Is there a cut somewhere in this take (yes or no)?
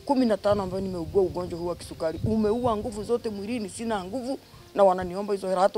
no